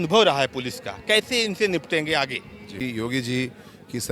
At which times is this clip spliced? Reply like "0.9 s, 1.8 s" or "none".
2.7 s